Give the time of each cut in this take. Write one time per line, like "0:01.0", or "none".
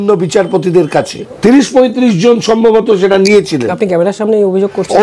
0:01.2